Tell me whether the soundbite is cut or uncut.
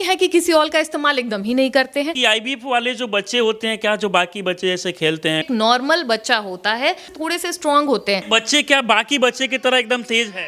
cut